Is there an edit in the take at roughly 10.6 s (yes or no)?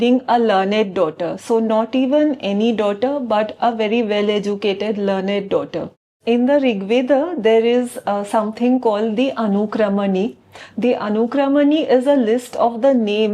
no